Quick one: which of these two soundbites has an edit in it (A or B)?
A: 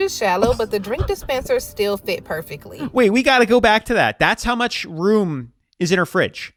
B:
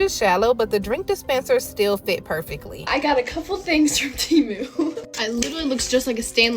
B